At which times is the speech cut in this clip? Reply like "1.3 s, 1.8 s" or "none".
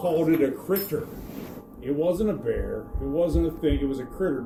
none